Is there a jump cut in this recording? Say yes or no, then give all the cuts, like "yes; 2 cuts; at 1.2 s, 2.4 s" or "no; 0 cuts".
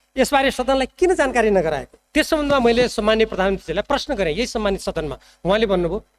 yes; 1 cut; at 1.9 s